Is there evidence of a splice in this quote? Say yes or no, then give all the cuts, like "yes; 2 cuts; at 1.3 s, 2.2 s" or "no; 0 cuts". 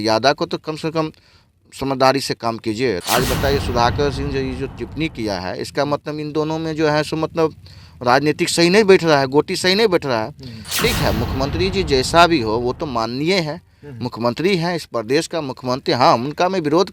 yes; 1 cut; at 3.0 s